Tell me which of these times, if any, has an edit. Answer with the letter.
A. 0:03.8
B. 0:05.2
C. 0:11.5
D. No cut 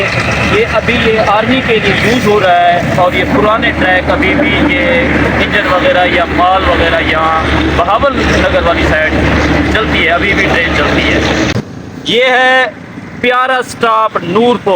C